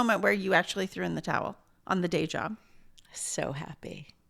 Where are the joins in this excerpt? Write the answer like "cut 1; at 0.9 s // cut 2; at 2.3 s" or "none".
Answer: none